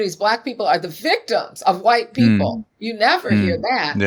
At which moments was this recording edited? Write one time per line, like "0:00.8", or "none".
none

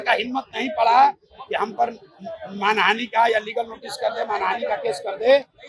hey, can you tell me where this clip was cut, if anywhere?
none

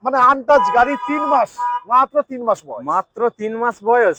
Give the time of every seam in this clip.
none

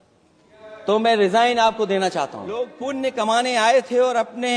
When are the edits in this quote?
0:02.7

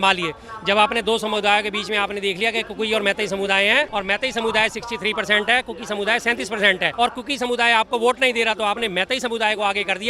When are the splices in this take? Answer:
0:03.9
0:06.9

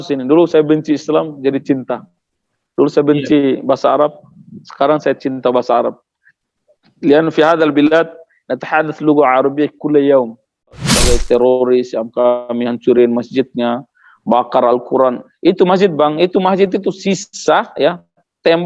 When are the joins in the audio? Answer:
0:10.9

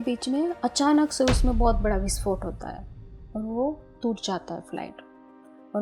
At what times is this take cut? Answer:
none

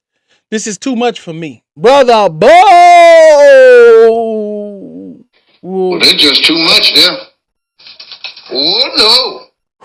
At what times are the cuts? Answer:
none

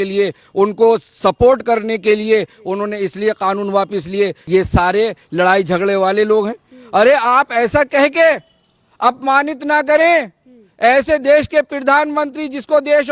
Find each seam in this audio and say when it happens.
0:04.4

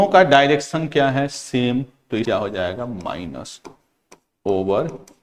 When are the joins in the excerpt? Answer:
0:02.2

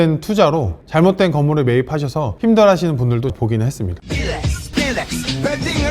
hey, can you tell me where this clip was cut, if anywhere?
0:03.9

